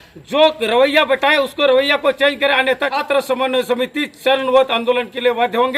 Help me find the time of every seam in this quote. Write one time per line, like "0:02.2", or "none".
0:02.9